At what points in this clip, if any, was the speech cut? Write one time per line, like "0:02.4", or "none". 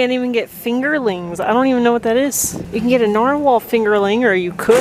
none